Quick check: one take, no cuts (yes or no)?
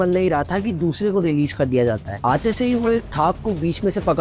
yes